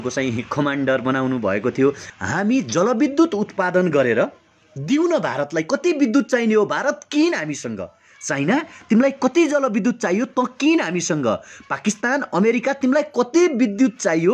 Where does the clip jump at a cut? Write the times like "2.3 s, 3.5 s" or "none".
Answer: 2.1 s